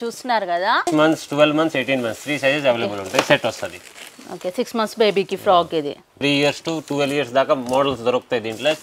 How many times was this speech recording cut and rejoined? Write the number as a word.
two